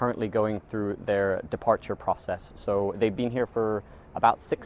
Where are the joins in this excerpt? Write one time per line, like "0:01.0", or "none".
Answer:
0:01.0